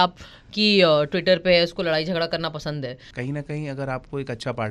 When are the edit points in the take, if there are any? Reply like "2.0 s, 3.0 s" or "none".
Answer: 3.1 s